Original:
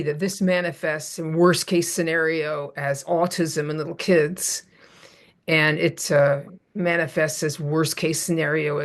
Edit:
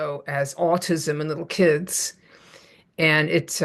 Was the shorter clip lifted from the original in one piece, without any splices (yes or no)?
yes